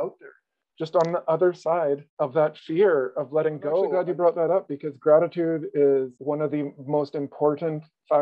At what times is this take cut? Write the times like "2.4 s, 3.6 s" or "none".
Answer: 2.1 s, 3.9 s